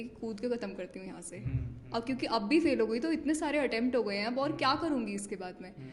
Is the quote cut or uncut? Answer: uncut